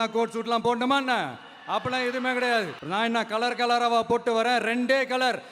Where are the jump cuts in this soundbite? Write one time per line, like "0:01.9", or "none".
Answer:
0:02.8